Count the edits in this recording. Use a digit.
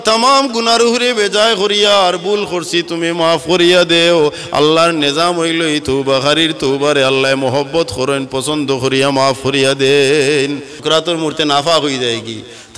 1